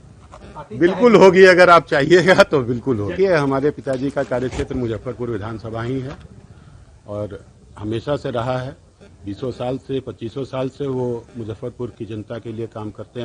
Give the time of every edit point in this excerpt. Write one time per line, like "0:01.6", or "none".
0:03.1